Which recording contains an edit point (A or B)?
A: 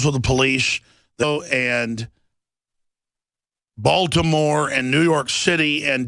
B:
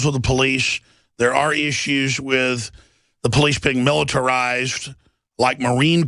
B